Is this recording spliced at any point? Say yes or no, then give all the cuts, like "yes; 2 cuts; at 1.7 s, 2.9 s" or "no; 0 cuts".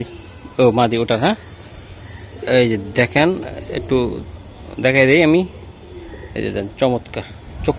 no; 0 cuts